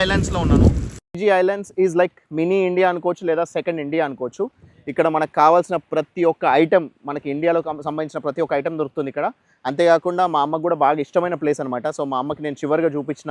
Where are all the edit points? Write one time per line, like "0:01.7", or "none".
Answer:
none